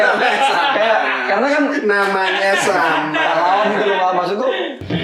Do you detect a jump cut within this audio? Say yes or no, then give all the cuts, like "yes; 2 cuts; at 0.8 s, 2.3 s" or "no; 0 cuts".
no; 0 cuts